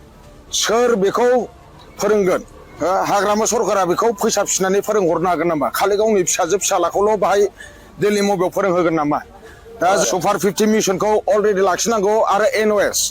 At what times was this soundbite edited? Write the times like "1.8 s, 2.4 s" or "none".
10.0 s